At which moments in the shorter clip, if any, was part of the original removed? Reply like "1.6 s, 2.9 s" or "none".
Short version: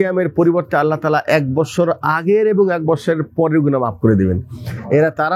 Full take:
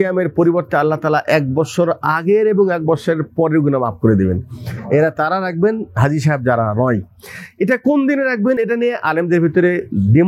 none